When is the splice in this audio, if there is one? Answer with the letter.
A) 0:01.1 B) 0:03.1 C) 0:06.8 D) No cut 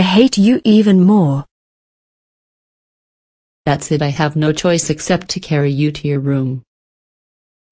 D